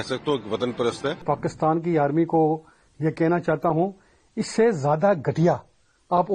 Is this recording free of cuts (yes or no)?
no